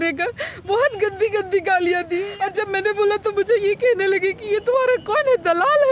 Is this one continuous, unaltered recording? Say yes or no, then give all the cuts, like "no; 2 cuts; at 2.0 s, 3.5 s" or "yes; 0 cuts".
no; 1 cut; at 2.3 s